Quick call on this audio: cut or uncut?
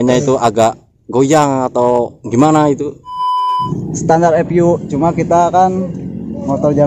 cut